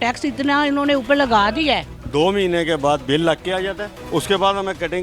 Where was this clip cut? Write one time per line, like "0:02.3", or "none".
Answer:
0:02.0
0:03.9